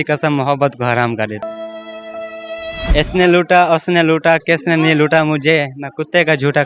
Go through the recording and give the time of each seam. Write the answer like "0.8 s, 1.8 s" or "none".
2.9 s